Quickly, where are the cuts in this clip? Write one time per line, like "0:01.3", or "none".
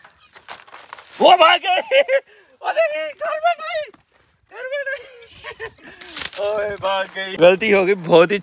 0:07.3